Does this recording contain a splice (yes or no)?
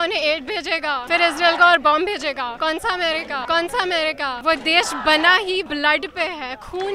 yes